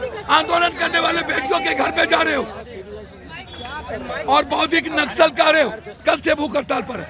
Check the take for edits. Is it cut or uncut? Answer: cut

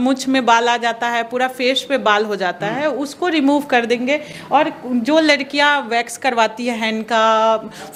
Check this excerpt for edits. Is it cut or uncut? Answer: uncut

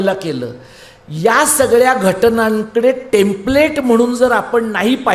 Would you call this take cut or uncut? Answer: uncut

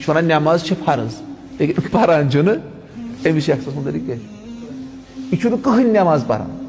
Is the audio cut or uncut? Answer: uncut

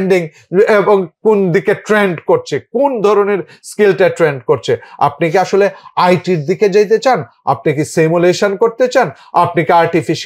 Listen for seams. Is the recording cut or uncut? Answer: uncut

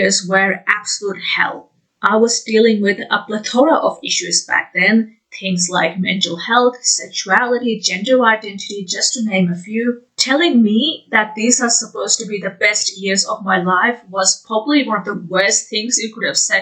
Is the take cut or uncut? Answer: uncut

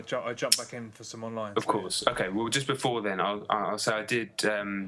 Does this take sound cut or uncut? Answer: cut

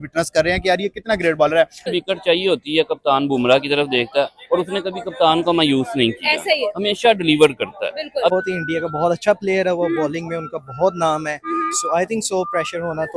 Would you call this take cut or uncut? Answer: cut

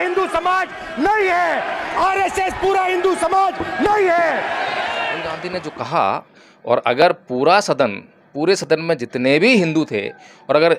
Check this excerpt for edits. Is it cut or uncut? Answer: cut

